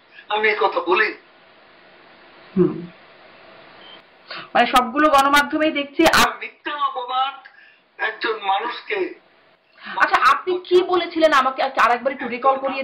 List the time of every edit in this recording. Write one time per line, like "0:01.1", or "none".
none